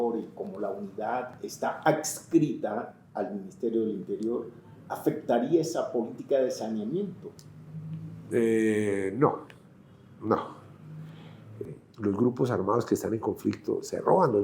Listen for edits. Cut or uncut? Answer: cut